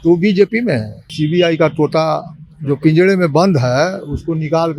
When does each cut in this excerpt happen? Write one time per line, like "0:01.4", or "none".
0:01.0